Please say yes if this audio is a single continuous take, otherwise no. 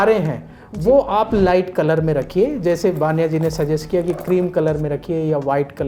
yes